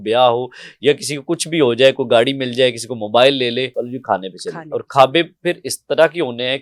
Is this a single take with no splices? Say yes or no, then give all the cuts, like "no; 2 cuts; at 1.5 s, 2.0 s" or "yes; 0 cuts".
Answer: no; 1 cut; at 3.7 s